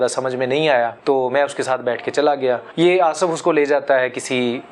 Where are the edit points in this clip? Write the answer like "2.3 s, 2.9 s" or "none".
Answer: 1.0 s, 2.7 s